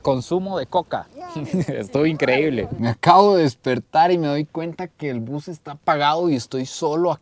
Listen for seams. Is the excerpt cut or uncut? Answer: cut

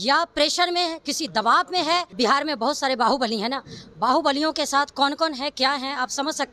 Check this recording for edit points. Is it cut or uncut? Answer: cut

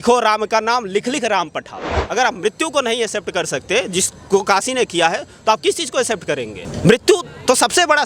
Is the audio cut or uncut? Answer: cut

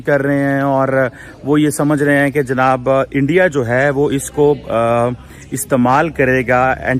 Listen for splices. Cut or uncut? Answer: uncut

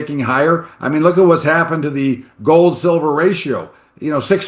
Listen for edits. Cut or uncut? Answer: uncut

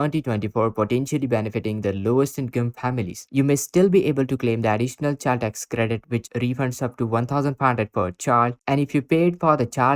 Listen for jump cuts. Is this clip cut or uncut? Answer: cut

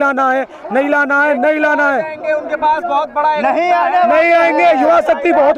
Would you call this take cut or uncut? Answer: uncut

